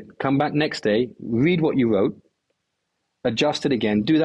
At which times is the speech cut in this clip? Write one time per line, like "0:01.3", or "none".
none